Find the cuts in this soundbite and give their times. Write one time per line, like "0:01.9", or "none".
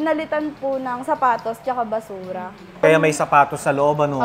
0:02.8